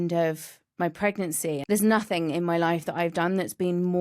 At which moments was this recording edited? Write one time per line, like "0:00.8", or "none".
0:01.6